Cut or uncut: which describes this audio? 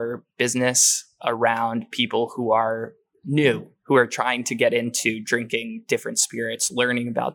uncut